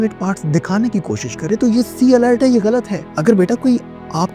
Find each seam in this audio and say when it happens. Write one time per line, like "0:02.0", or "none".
0:03.0

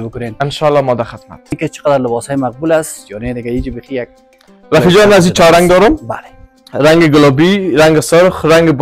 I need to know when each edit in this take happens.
0:01.6

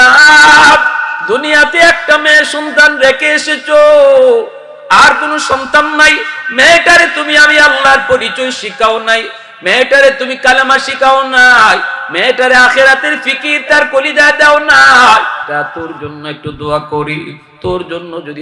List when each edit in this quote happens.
0:15.4

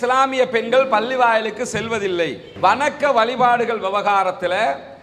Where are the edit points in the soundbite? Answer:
0:02.4

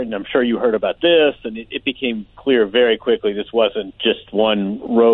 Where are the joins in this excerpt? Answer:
0:03.9

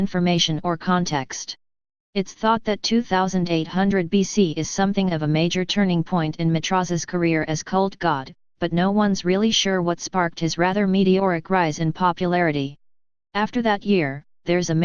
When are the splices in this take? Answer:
0:12.2

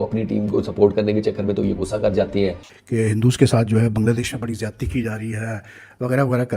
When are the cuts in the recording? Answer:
0:02.7

